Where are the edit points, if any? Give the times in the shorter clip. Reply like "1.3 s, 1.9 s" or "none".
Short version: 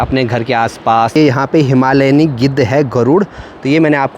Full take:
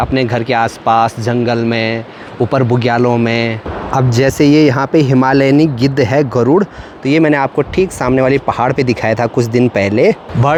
1.2 s